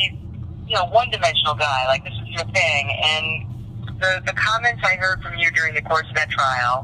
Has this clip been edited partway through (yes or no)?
no